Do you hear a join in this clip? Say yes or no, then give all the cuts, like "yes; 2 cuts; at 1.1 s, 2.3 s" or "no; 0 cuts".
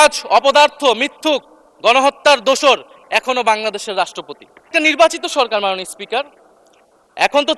yes; 1 cut; at 4.7 s